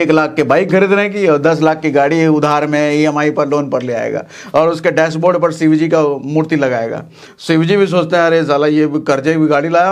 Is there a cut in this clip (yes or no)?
no